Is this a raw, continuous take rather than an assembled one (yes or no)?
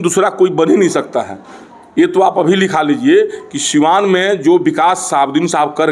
yes